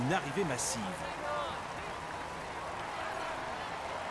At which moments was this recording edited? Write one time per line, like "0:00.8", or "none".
0:03.1